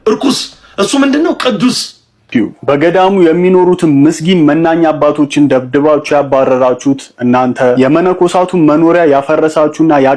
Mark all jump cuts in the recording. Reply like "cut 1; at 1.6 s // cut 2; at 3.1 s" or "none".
cut 1; at 2.3 s